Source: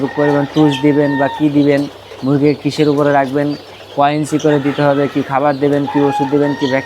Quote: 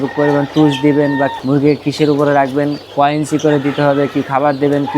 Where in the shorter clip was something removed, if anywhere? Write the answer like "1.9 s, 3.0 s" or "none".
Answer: 1.3 s, 2.8 s